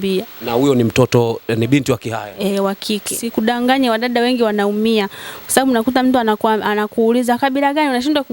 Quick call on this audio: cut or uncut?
cut